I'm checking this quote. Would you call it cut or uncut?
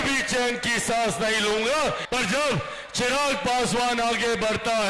cut